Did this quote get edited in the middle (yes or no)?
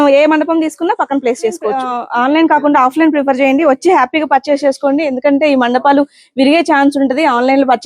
yes